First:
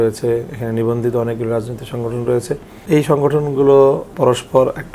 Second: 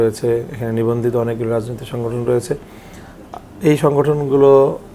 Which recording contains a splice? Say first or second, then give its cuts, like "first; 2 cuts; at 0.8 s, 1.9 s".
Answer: first; 2 cuts; at 2.7 s, 4.1 s